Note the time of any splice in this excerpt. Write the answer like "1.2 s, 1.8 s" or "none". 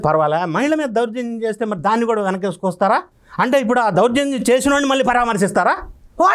none

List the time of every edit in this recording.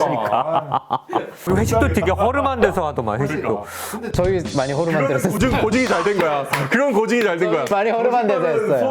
1.4 s

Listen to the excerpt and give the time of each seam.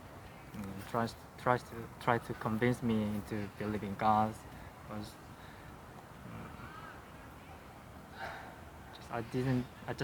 none

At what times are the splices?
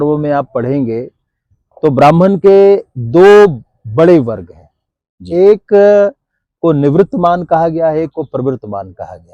none

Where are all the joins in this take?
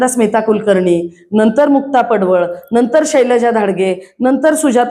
none

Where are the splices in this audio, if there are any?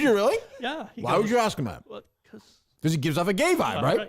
1.9 s

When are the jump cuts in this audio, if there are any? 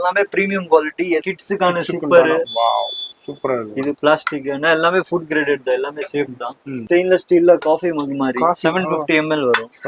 1.2 s, 6.8 s

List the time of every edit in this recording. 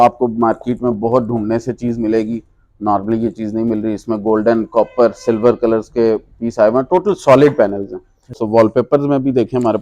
8.3 s

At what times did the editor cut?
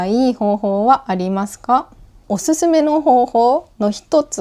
2.2 s

